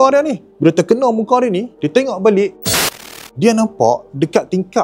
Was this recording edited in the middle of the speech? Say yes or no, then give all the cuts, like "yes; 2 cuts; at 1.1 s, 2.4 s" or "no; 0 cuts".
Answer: yes; 1 cut; at 2.7 s